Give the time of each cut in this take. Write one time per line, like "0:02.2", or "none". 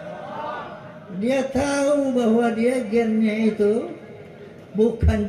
none